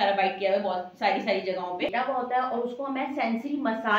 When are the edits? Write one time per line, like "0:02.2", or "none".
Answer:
0:01.9